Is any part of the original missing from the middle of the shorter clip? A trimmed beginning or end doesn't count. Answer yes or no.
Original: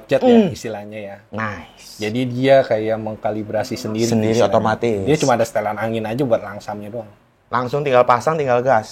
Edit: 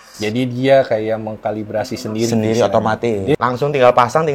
yes